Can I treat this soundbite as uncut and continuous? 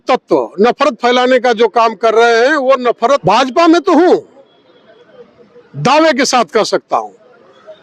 no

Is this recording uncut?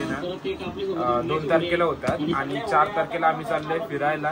yes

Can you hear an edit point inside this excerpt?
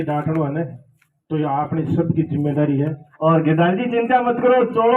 yes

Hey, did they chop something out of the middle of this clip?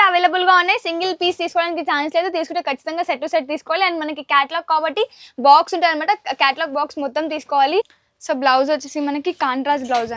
yes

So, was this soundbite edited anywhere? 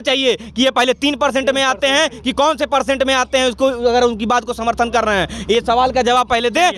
no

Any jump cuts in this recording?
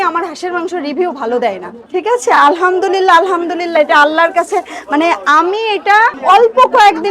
yes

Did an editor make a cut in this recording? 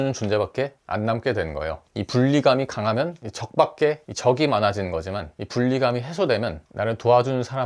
no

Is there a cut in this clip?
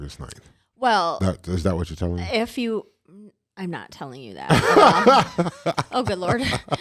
no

